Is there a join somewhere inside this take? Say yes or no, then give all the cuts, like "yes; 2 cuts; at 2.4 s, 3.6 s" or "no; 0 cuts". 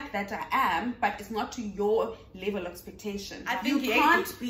yes; 1 cut; at 3.6 s